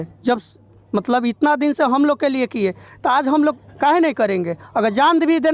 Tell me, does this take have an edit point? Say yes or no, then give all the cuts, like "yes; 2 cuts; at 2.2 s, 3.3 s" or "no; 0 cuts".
no; 0 cuts